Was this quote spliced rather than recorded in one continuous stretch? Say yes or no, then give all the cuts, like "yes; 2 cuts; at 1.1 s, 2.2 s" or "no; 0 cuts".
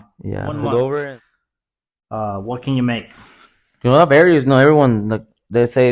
yes; 1 cut; at 1.1 s